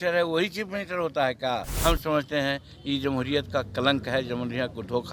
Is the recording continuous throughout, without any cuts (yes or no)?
no